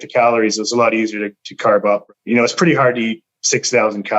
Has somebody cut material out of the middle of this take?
yes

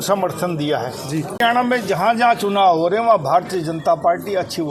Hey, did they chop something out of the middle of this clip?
yes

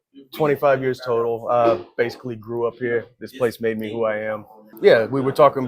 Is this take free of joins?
no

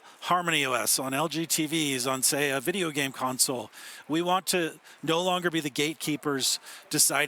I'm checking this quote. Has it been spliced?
no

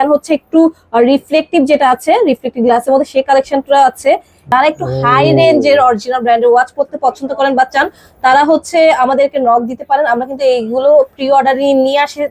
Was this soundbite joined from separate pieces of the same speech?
yes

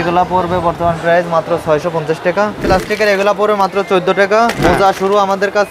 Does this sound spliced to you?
yes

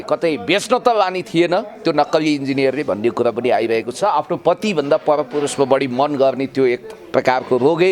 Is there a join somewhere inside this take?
yes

